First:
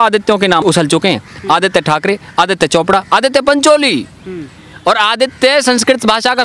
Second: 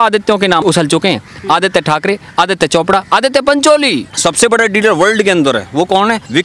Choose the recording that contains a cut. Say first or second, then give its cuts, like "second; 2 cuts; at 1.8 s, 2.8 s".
second; 1 cut; at 4.1 s